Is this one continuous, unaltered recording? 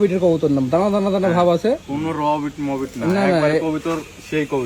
yes; 0 cuts

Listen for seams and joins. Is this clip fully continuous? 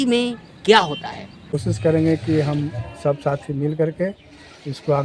no; 1 cut; at 1.5 s

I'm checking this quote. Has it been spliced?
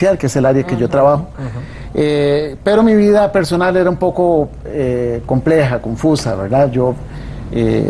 yes; 1 cut; at 1.6 s

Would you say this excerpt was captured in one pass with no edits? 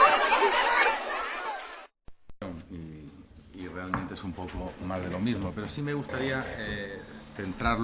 yes; 0 cuts

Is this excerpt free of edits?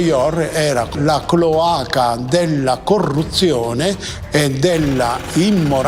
no; 1 cut; at 0.9 s

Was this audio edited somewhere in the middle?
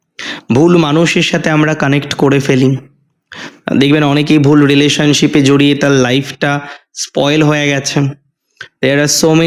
no; 0 cuts

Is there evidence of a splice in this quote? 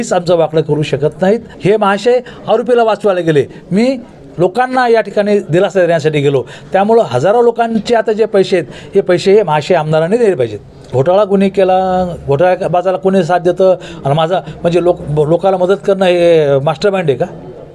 yes; 2 cuts; at 1.5 s, 10.9 s

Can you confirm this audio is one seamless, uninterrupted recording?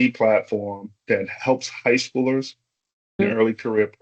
no; 1 cut; at 0.9 s

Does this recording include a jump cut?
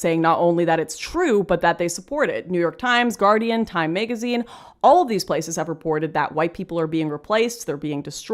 no; 0 cuts

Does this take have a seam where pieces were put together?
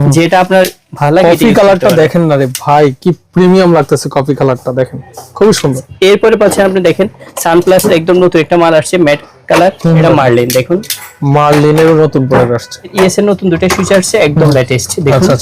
yes; 3 cuts; at 5.9 s, 10.0 s, 12.9 s

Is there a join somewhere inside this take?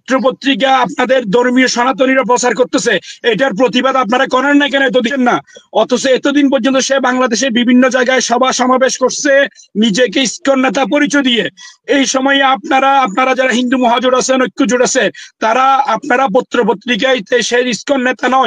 yes; 1 cut; at 5.1 s

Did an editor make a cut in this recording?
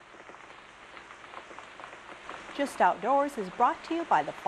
no; 0 cuts

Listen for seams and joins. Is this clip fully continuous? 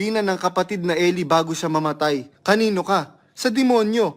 no; 1 cut; at 2.3 s

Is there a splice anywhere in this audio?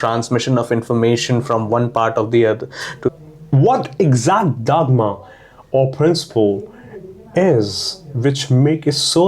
yes; 1 cut; at 3.1 s

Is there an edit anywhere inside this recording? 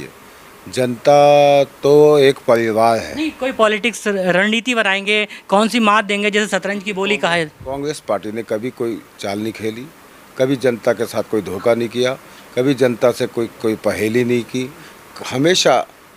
no; 0 cuts

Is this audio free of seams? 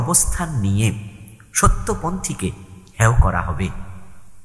yes; 0 cuts

